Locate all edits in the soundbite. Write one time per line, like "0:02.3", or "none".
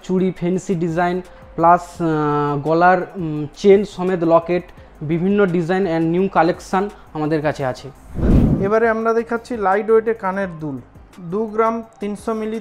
none